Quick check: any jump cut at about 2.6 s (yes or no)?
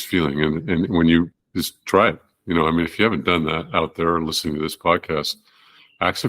no